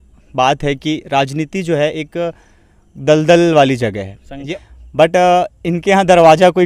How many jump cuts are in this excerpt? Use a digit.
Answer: 1